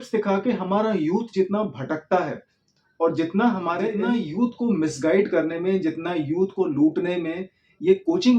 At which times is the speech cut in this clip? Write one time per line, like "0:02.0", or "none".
0:04.0